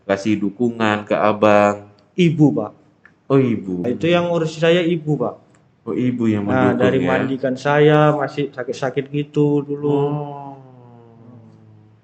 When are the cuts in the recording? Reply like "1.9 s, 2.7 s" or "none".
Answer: 3.8 s